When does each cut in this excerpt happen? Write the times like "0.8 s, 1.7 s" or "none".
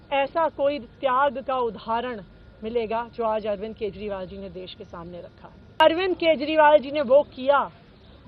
5.8 s

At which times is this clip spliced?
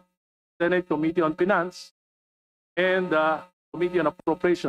none

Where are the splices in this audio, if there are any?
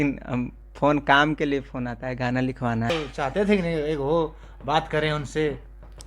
2.9 s

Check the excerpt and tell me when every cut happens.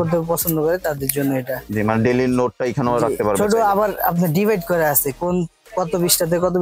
none

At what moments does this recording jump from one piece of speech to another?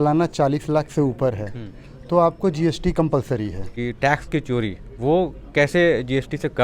3.7 s

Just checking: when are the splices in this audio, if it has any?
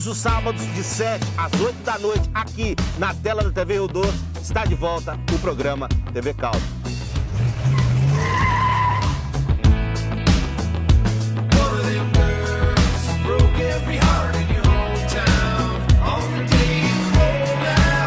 none

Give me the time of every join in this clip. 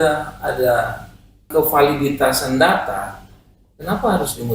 1.5 s

